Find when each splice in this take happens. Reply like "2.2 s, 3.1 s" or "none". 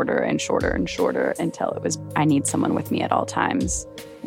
2.0 s